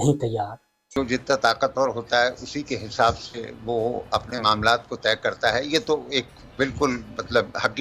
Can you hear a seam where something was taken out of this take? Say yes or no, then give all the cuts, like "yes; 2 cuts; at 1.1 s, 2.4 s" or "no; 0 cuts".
yes; 1 cut; at 0.9 s